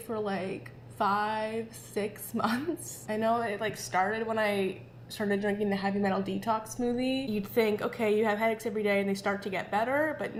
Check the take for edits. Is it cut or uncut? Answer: uncut